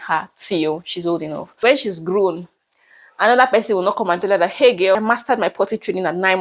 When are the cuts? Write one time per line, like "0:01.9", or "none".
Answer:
0:01.5
0:05.0